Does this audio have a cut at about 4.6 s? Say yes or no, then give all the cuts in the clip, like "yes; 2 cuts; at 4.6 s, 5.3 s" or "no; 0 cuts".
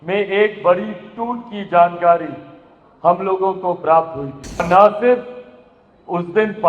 yes; 1 cut; at 4.6 s